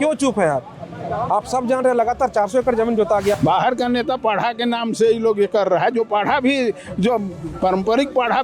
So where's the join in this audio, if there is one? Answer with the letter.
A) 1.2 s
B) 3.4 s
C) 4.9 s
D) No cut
B